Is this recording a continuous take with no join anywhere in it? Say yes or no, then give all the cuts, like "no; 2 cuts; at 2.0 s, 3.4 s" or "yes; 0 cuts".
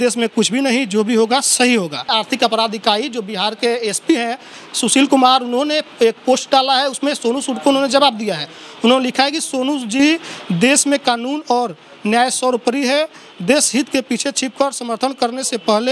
no; 1 cut; at 2.0 s